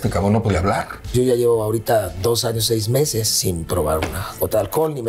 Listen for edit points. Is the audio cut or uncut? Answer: cut